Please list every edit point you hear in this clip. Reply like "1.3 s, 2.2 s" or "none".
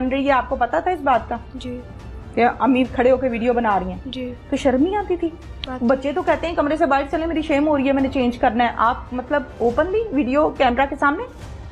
none